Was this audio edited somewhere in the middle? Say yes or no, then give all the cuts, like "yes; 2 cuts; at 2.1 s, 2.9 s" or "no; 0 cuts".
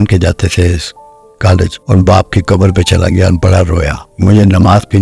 yes; 2 cuts; at 1.8 s, 4.0 s